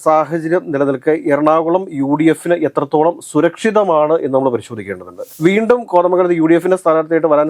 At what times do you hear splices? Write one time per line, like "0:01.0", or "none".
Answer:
0:05.3